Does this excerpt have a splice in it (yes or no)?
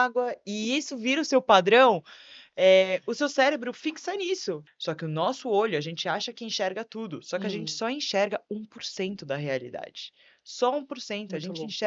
yes